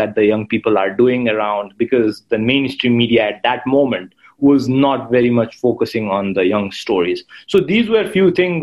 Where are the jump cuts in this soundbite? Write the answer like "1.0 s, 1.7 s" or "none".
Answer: none